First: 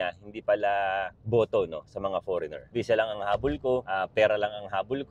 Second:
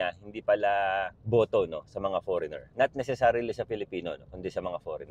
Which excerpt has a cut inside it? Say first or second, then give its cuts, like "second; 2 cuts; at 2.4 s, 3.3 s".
first; 1 cut; at 2.6 s